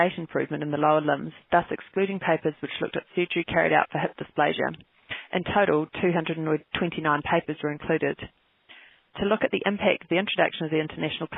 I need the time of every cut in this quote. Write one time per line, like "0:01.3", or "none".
none